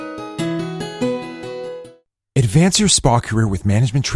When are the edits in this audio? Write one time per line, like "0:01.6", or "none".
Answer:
0:01.8